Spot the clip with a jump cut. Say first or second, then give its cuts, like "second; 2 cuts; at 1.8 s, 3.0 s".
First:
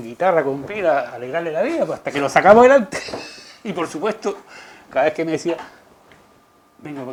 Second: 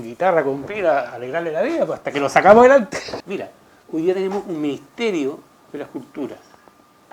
second; 1 cut; at 3.2 s